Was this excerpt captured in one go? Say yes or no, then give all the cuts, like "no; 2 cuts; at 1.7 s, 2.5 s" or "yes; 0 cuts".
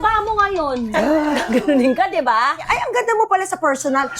no; 1 cut; at 2.6 s